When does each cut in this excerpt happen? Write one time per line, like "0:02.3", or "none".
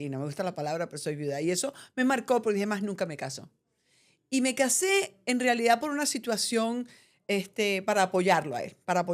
none